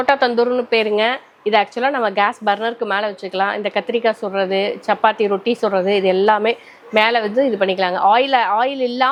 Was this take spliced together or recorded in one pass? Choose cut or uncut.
uncut